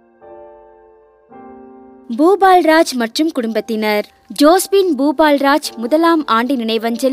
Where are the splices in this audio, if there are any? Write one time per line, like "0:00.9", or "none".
0:02.0